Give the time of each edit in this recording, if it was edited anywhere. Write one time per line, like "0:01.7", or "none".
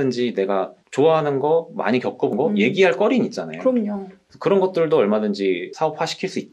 none